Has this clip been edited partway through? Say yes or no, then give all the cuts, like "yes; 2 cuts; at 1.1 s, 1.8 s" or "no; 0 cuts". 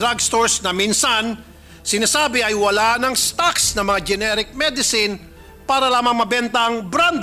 no; 0 cuts